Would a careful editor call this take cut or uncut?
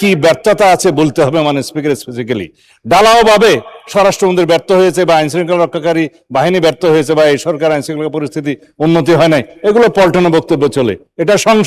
uncut